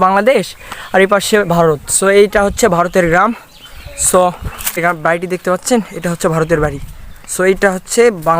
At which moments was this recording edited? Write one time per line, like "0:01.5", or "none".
0:04.8